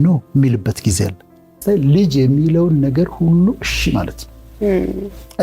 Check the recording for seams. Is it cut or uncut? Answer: cut